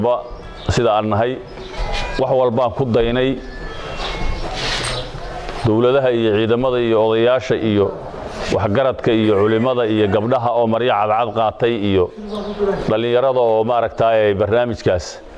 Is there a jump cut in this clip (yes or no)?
yes